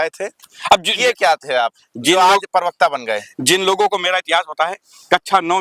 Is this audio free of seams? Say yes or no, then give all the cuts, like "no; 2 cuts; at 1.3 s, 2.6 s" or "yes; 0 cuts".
yes; 0 cuts